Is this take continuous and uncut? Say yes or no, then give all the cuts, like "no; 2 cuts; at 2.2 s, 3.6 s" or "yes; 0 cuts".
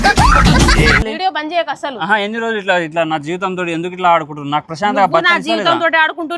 no; 1 cut; at 1.1 s